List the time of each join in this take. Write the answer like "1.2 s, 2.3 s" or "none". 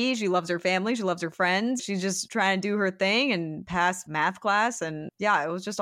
1.8 s, 3.9 s, 5.1 s